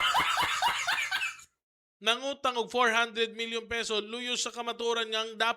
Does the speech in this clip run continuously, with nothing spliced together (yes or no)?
no